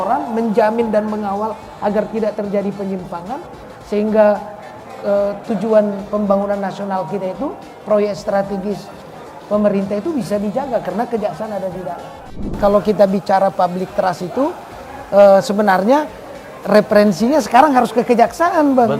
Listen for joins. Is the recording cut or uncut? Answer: cut